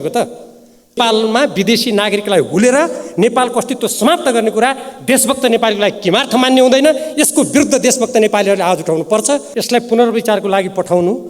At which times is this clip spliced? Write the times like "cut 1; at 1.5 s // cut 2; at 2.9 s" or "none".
cut 1; at 0.9 s // cut 2; at 9.4 s